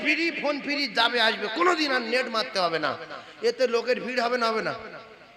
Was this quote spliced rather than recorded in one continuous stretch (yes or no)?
no